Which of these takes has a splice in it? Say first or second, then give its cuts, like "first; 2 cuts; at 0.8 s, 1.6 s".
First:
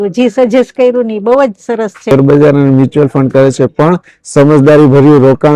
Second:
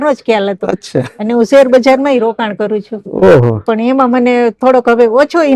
first; 1 cut; at 2.1 s